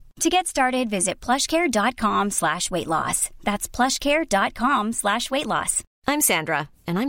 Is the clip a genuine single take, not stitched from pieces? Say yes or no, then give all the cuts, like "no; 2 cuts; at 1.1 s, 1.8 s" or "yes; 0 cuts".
yes; 0 cuts